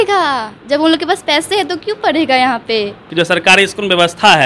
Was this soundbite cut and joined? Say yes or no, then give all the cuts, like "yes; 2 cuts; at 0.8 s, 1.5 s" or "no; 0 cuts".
yes; 1 cut; at 3.0 s